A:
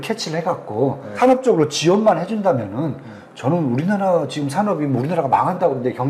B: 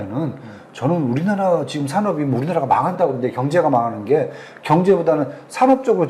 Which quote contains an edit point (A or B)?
A